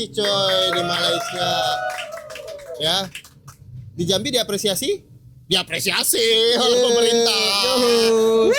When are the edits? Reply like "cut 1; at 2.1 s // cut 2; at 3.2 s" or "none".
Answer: none